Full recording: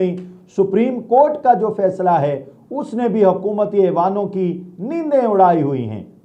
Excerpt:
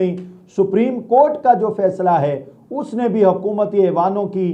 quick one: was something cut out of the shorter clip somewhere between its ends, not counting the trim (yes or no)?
no